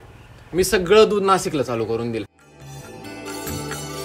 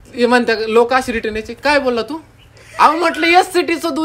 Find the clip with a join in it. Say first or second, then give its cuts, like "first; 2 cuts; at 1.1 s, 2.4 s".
first; 1 cut; at 2.3 s